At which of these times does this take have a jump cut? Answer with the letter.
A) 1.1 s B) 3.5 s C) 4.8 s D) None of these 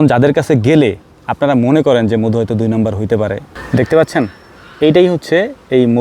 B